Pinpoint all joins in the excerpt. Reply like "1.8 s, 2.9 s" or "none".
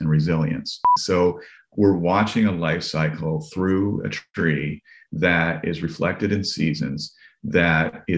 1.0 s